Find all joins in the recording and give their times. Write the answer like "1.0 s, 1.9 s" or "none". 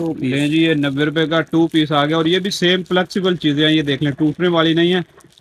none